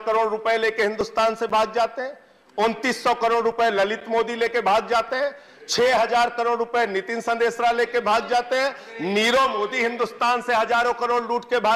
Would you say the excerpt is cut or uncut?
uncut